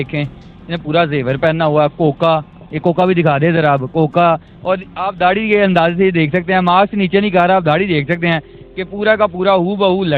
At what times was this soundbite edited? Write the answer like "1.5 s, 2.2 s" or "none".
none